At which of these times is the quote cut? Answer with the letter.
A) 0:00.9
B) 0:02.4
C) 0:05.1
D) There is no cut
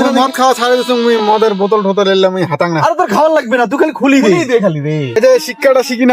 C